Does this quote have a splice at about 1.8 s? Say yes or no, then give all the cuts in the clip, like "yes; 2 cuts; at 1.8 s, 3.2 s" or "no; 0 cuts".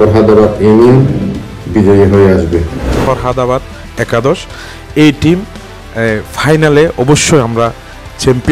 no; 1 cut; at 3.0 s